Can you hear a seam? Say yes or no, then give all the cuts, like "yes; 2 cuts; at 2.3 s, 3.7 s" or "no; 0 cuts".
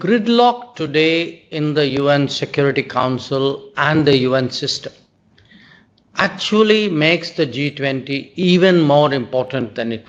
no; 0 cuts